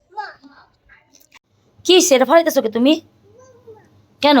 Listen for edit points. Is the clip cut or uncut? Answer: cut